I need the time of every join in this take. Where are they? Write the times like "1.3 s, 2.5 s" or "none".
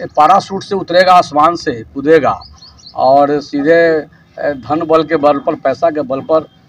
none